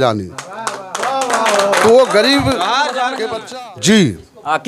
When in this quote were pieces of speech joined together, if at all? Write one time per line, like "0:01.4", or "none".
0:03.3

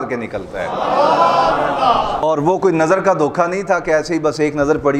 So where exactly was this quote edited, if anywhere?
none

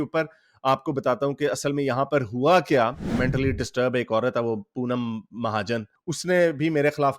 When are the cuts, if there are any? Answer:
0:03.1

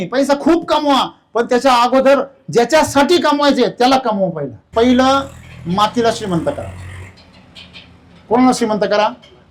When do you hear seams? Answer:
none

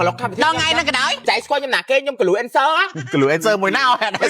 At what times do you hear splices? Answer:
0:01.2
0:02.9

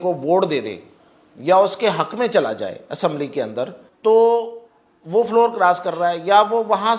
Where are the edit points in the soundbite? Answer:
0:03.8

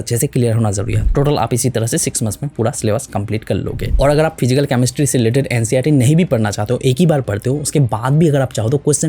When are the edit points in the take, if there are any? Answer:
0:01.0
0:03.8

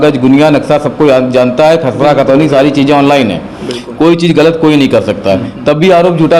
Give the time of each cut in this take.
none

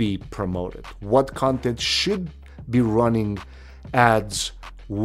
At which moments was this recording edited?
none

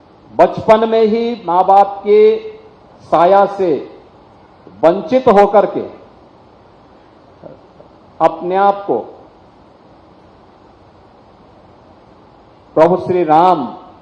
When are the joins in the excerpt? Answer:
none

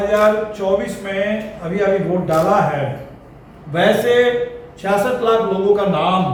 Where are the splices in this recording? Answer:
none

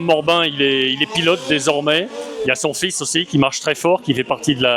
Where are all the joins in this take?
none

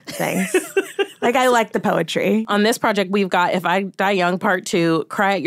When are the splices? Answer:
0:02.4

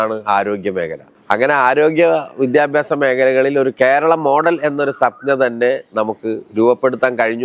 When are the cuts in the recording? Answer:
0:01.1

